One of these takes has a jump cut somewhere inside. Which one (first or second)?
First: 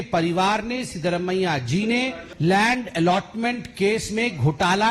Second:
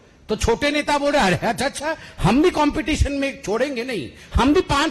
first